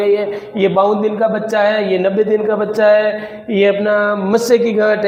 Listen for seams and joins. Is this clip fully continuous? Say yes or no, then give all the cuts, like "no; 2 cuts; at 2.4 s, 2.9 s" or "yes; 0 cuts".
yes; 0 cuts